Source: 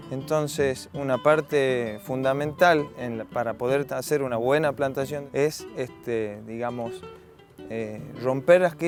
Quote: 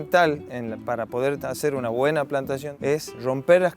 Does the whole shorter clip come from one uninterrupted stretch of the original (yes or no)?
no